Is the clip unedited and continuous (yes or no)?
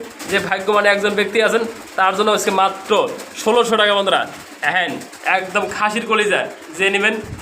yes